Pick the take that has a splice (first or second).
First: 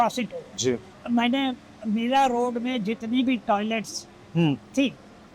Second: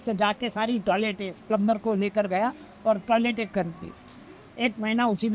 first